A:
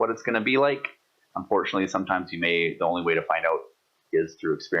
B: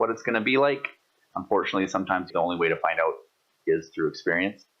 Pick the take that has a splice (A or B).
B